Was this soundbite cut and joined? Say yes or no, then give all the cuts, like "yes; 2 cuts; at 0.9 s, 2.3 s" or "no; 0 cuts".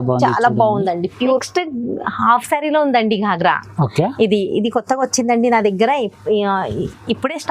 yes; 1 cut; at 1.4 s